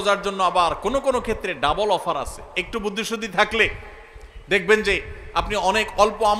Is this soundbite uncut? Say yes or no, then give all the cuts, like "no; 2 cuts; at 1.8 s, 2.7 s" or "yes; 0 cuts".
yes; 0 cuts